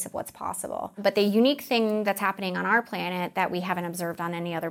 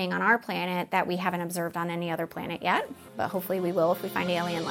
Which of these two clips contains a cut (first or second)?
first